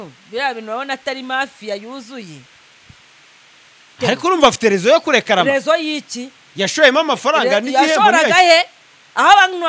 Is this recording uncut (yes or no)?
no